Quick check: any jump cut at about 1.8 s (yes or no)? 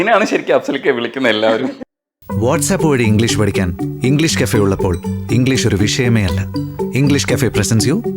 yes